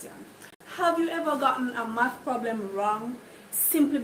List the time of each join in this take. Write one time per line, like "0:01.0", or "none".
none